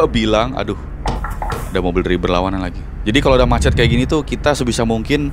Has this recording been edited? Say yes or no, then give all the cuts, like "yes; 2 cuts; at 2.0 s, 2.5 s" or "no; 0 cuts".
no; 0 cuts